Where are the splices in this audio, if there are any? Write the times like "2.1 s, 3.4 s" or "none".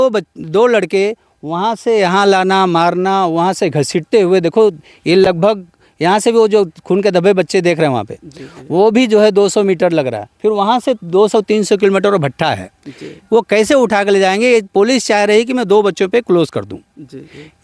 none